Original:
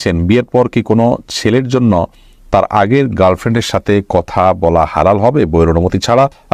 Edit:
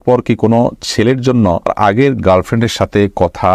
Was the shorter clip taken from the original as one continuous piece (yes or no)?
no